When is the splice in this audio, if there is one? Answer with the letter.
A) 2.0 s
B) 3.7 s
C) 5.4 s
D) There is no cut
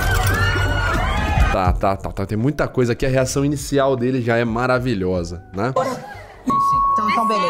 D